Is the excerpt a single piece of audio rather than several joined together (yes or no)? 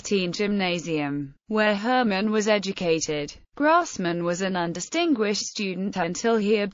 no